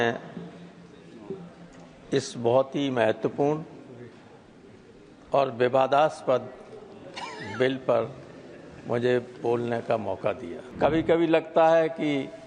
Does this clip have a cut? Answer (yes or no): yes